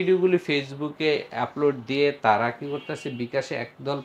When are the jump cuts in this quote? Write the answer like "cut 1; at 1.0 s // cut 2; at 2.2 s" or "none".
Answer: none